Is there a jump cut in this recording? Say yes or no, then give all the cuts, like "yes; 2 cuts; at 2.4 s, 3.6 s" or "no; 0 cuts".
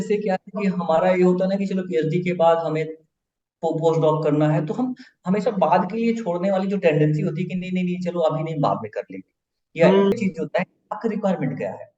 yes; 1 cut; at 10.1 s